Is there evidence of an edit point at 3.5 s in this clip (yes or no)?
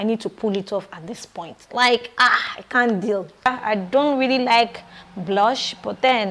yes